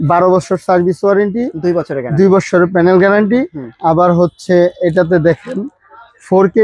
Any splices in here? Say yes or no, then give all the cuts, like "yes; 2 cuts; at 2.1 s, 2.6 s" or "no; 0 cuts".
no; 0 cuts